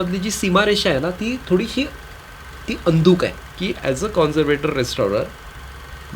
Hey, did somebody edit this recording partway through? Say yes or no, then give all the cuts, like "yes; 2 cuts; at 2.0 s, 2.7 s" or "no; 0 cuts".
yes; 1 cut; at 3.5 s